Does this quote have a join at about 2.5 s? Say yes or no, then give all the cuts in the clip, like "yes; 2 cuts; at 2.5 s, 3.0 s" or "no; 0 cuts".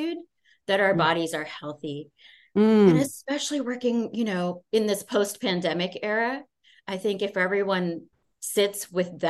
no; 0 cuts